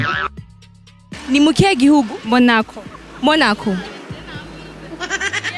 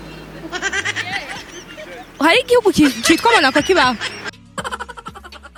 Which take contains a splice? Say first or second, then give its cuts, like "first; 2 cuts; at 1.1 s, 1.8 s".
first; 1 cut; at 1.0 s